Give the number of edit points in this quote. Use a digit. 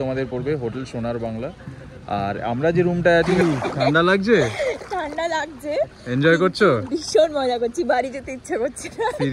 1